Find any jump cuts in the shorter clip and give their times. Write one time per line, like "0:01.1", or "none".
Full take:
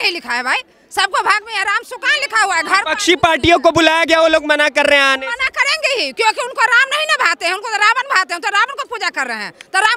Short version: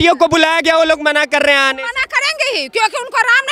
none